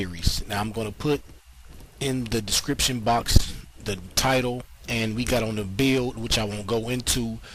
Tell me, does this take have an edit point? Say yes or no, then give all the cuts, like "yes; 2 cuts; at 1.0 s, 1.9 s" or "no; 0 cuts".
no; 0 cuts